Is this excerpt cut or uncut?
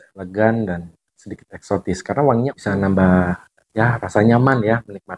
cut